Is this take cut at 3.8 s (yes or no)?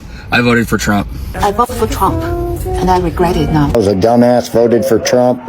yes